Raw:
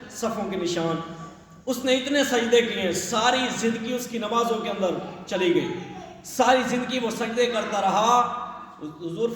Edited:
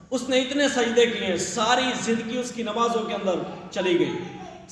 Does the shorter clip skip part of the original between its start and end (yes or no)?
no